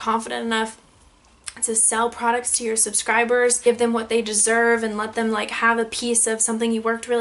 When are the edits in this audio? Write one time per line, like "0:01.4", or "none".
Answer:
0:03.6